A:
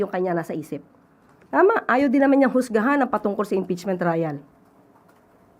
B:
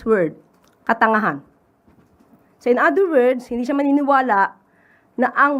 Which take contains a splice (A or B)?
A